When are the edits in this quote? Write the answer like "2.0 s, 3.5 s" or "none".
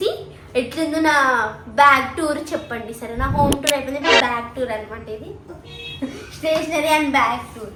none